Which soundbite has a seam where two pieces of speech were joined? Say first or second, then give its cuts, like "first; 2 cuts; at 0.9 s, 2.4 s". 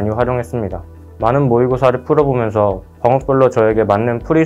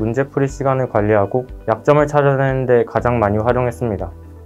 second; 1 cut; at 1.5 s